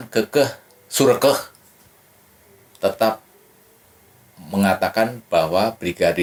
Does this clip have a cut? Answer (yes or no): no